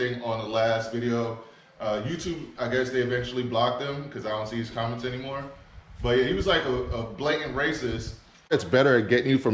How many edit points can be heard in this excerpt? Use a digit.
1